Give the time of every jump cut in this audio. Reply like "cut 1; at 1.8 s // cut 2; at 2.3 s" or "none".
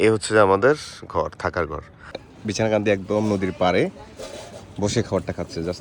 cut 1; at 2.2 s